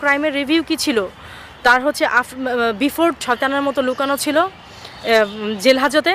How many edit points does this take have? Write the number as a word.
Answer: one